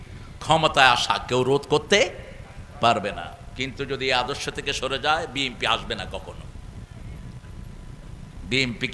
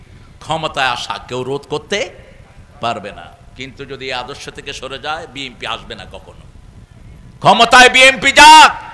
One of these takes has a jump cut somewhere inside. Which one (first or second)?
second